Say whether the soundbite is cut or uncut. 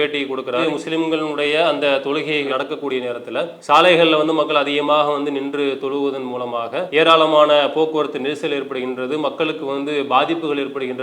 uncut